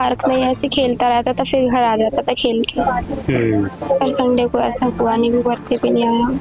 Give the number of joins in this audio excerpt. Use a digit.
0